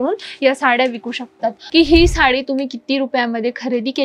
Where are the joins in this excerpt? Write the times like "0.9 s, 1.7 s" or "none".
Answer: 1.6 s